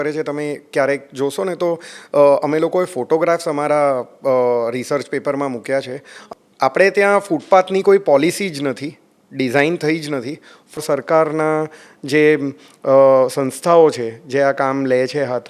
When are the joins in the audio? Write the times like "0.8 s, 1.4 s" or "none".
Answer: 6.2 s, 10.8 s